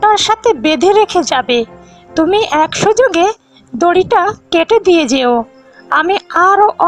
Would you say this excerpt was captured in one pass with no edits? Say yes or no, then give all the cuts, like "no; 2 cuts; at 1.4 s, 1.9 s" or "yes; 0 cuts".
yes; 0 cuts